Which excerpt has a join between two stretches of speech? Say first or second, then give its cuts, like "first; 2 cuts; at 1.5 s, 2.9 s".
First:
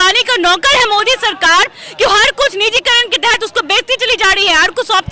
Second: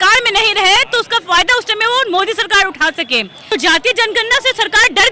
second; 1 cut; at 3.5 s